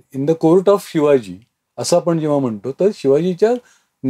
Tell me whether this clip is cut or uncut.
uncut